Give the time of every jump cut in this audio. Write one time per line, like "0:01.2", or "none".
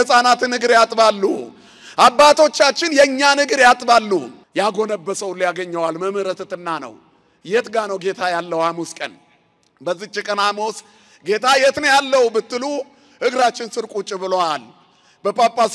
0:04.4